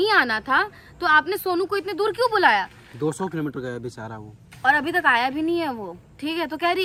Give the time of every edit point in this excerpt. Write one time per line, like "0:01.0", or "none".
none

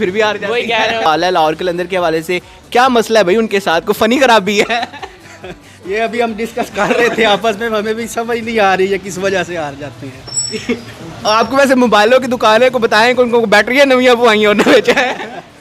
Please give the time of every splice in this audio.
0:01.1

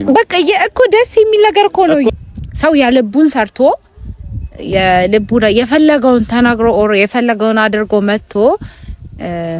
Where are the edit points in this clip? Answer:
0:02.1

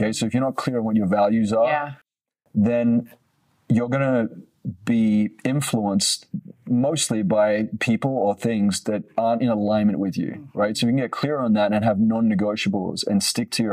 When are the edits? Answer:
none

